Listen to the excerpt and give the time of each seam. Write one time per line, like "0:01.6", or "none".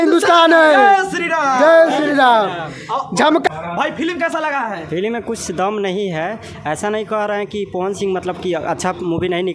0:03.5